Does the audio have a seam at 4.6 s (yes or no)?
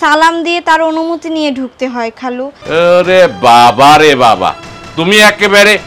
no